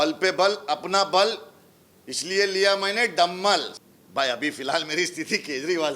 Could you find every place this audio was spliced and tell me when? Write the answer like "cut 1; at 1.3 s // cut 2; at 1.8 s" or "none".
cut 1; at 3.8 s